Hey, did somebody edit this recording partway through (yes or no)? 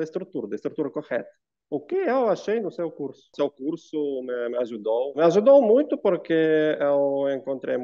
yes